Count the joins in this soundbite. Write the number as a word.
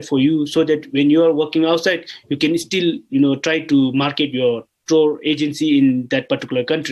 one